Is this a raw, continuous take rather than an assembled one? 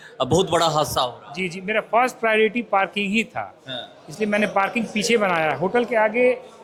yes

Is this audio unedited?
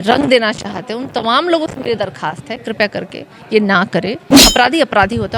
no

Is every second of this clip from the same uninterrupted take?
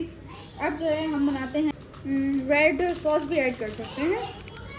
no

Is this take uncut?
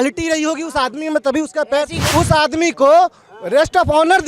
no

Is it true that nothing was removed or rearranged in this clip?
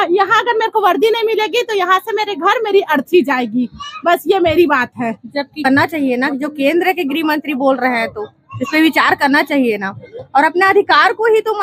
no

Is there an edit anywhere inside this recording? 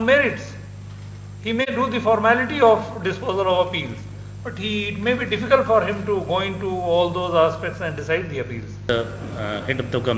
yes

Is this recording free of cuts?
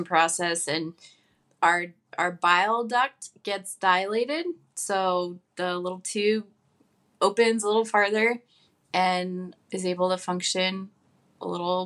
no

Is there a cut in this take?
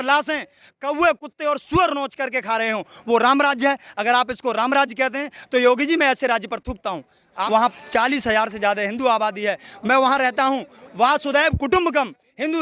yes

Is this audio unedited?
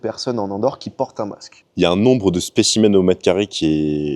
yes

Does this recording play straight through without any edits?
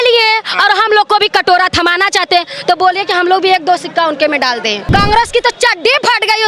no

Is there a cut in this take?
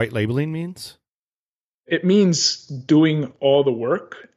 yes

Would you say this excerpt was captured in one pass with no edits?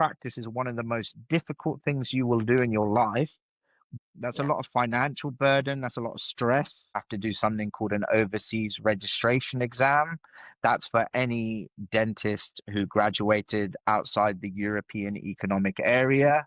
no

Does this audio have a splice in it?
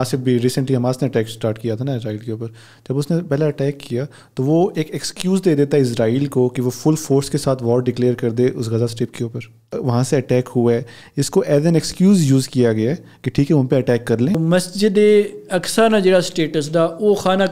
yes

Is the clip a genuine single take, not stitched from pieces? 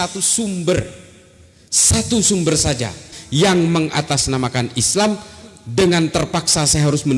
no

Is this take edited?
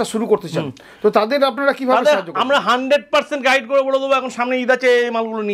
no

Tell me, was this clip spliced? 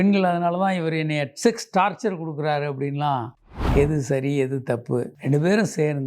yes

